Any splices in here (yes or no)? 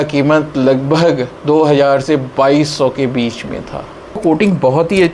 yes